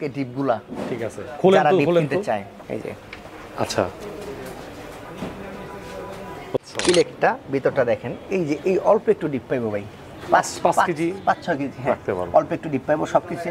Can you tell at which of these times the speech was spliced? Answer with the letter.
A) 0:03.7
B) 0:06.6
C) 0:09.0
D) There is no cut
B